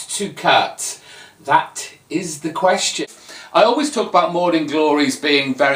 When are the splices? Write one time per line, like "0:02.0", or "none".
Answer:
0:03.0